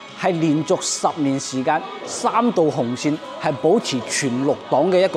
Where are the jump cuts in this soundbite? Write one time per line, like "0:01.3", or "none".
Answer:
none